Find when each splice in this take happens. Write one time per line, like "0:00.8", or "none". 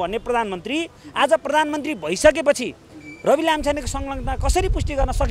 none